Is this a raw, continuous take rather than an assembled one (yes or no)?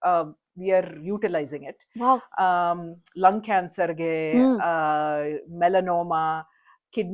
yes